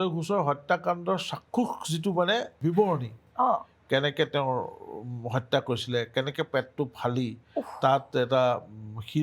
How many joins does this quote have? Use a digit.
1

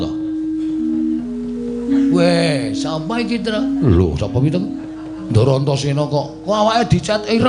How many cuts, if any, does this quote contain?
0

